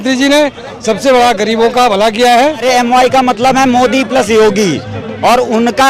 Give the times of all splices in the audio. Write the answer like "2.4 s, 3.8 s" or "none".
2.6 s